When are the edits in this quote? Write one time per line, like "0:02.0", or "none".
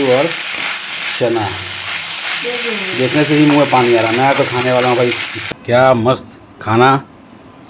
0:05.4